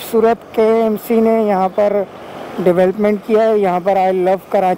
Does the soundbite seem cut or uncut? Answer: uncut